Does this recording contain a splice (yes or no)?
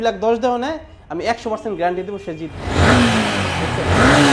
yes